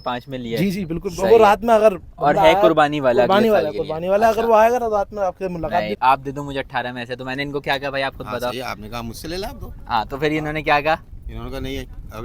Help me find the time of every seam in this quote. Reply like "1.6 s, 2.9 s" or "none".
5.9 s